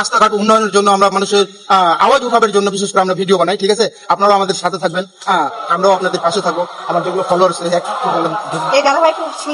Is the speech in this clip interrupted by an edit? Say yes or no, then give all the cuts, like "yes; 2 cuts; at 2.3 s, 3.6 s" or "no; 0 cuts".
no; 0 cuts